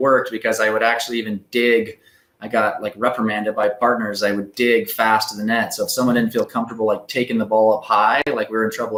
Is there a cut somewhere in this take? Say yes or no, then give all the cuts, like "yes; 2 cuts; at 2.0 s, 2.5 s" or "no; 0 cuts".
no; 0 cuts